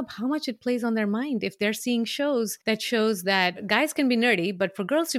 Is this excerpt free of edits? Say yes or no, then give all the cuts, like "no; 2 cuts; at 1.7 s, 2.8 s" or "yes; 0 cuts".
no; 2 cuts; at 2.6 s, 3.6 s